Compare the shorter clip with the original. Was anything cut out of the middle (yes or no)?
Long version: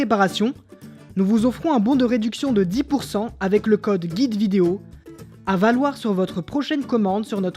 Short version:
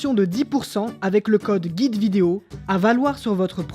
yes